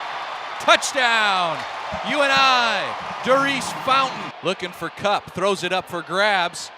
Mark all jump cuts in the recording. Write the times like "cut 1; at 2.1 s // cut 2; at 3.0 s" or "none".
cut 1; at 4.3 s

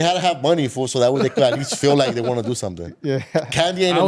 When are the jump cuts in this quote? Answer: none

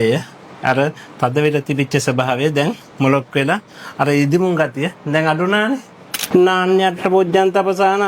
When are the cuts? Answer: cut 1; at 6.2 s

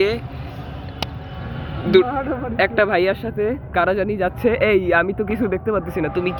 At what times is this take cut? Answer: none

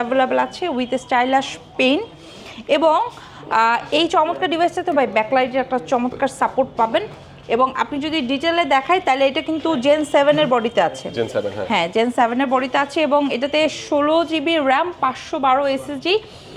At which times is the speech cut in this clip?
none

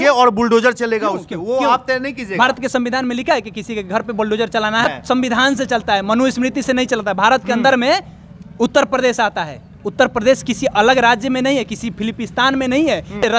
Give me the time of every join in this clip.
none

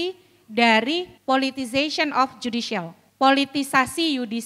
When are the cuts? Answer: cut 1; at 1.1 s // cut 2; at 3.0 s

